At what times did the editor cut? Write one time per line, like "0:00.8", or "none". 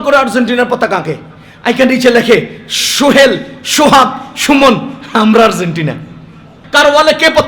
0:06.5